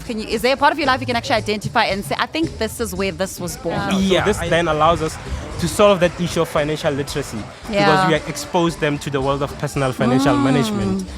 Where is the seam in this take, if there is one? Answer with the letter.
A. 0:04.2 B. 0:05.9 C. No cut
A